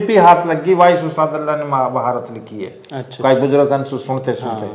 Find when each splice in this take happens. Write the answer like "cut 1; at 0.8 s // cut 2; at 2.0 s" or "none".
none